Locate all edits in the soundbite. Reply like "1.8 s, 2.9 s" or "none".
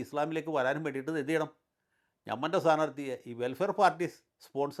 none